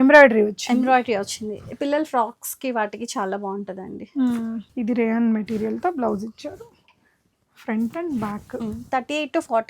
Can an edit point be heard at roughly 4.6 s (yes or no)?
yes